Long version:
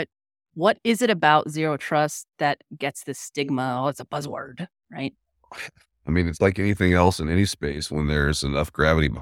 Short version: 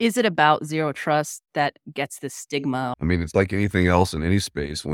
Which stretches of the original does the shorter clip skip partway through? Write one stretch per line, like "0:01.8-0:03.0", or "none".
0:03.8-0:06.0